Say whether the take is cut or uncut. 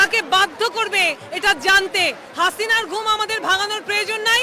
cut